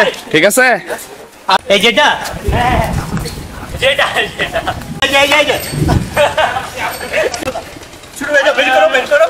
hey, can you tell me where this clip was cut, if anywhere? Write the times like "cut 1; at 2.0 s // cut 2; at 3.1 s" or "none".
cut 1; at 1.6 s // cut 2; at 5.0 s // cut 3; at 7.4 s